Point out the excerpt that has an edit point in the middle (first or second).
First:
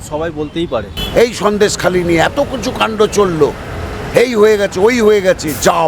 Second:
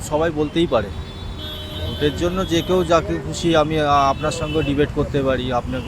first